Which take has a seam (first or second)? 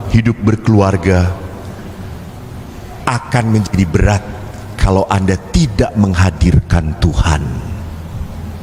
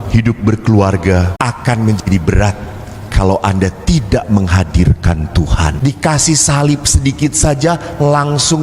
second